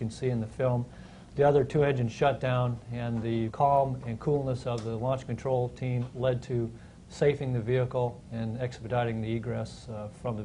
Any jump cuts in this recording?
yes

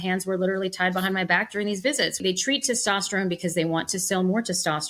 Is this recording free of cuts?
no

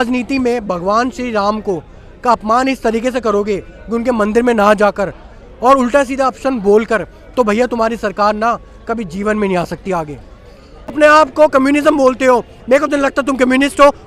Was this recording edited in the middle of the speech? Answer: yes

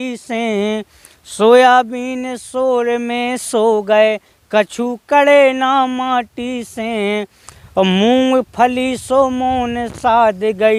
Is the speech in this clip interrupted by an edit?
no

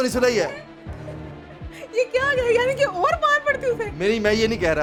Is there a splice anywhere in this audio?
no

